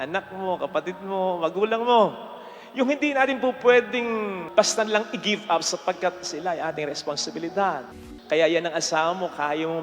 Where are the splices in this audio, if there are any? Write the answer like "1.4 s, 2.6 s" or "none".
8.0 s